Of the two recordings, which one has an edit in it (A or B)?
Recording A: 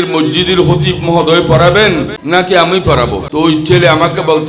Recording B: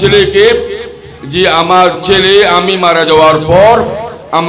A